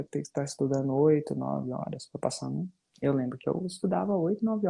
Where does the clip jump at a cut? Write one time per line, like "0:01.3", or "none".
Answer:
0:02.8